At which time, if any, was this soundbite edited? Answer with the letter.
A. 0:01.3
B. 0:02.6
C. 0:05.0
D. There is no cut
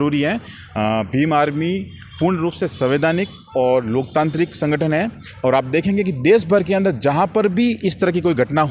D